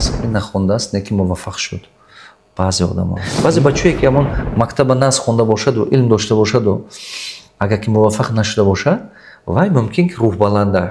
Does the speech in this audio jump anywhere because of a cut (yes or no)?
yes